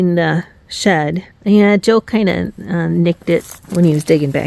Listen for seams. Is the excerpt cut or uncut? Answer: cut